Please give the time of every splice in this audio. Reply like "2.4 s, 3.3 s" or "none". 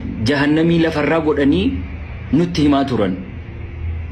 none

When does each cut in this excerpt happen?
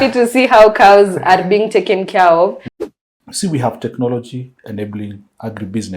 2.7 s

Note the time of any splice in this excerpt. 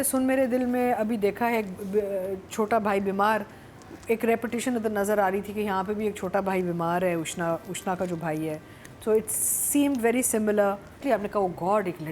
11.0 s

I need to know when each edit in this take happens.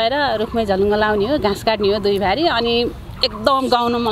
none

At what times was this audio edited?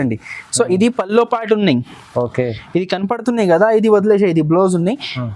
none

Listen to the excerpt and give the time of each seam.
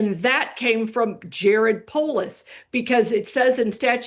none

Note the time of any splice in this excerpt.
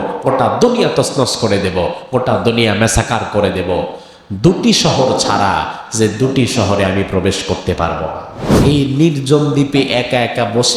8.6 s

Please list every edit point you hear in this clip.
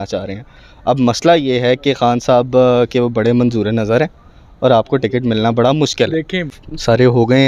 6.6 s

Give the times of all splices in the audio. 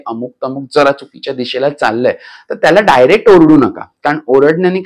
none

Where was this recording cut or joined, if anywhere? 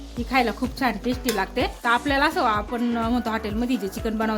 1.8 s

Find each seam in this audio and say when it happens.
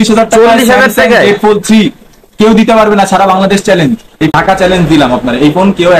4.3 s

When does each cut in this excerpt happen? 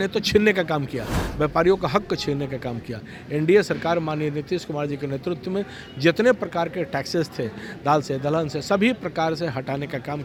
none

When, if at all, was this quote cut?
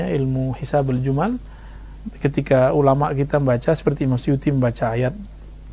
none

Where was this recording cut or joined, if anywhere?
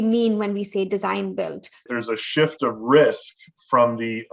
1.9 s

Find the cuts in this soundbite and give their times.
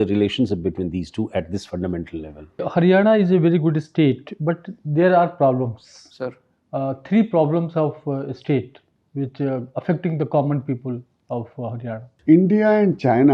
2.6 s, 12.1 s

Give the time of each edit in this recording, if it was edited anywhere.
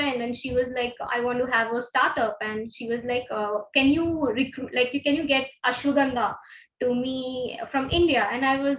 none

